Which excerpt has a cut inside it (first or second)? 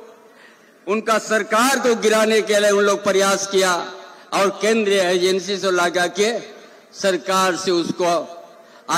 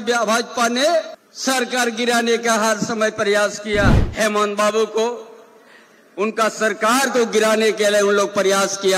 second